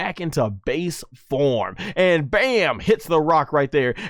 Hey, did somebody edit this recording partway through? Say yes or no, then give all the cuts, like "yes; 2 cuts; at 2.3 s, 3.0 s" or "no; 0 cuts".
no; 0 cuts